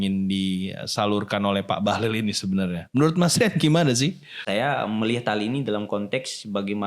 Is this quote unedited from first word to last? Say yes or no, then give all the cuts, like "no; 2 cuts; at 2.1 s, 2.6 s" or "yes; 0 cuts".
no; 1 cut; at 4.4 s